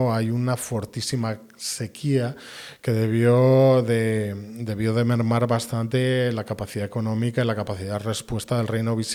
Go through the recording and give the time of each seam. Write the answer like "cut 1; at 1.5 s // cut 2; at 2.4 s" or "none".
none